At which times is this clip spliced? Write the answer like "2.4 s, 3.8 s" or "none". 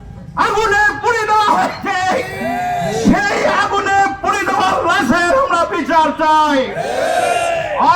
none